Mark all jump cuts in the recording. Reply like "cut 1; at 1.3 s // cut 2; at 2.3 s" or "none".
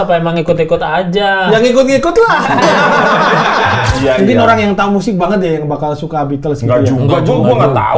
cut 1; at 3.9 s